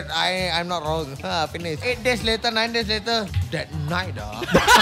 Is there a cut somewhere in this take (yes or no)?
yes